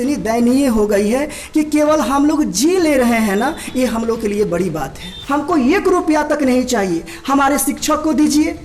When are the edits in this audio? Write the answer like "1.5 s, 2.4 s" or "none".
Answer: 5.1 s

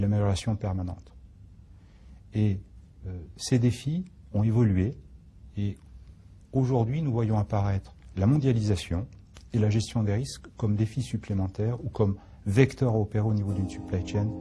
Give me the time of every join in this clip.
none

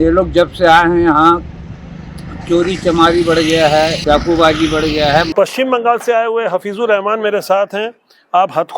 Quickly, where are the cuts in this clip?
4.0 s, 5.3 s

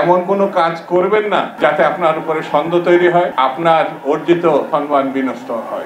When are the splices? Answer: 1.5 s, 3.3 s, 4.7 s

